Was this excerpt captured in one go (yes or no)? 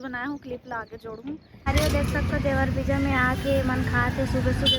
no